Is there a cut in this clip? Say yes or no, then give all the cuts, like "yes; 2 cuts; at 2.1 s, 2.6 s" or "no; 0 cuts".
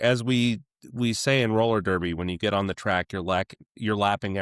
no; 0 cuts